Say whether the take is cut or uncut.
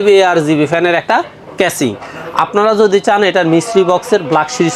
uncut